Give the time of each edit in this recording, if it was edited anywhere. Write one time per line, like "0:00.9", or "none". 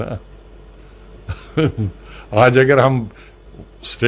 none